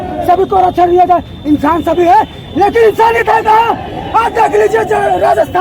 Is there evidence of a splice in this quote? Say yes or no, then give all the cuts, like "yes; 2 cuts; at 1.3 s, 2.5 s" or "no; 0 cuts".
no; 0 cuts